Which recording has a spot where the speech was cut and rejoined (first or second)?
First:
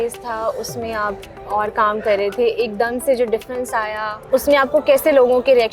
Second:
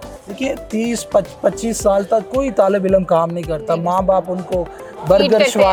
first